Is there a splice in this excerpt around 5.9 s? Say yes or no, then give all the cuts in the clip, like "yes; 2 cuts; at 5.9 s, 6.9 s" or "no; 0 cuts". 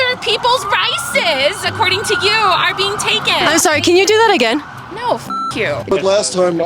yes; 2 cuts; at 3.4 s, 5.9 s